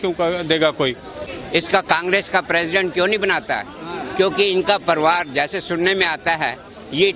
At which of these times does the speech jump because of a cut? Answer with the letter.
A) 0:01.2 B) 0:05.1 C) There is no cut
A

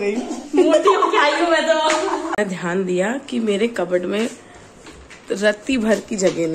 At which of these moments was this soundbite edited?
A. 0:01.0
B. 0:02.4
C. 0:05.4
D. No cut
B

